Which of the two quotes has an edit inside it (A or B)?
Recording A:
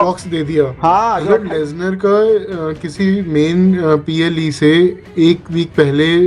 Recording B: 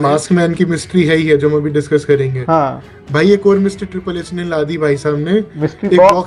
A